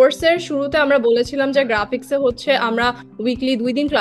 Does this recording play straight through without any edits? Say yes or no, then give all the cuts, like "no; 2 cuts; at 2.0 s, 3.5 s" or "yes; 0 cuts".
yes; 0 cuts